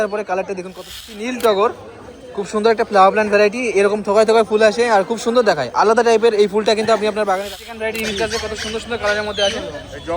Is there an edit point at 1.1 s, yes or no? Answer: yes